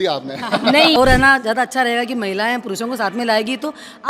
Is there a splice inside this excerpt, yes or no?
yes